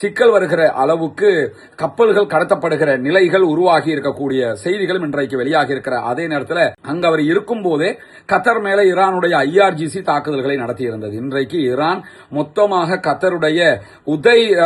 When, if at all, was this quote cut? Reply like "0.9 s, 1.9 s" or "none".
6.8 s

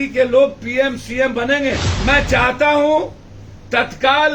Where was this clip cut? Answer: 1.9 s

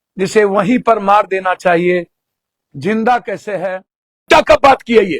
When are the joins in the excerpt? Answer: 4.3 s

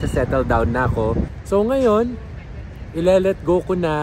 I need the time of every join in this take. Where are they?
1.3 s

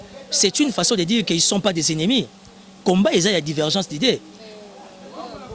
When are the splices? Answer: none

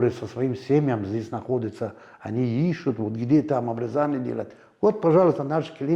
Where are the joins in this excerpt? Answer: none

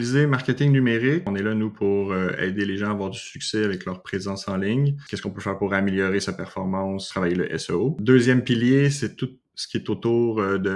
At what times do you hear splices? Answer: 1.3 s, 5.1 s, 7.0 s, 8.0 s

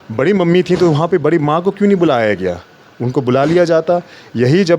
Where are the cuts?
none

